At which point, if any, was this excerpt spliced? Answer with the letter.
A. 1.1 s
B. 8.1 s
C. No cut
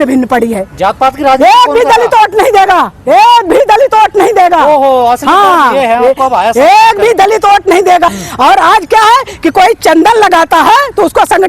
B